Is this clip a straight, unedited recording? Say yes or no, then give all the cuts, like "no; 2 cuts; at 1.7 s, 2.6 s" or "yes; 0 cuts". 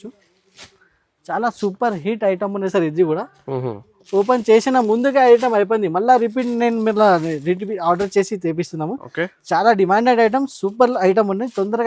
yes; 0 cuts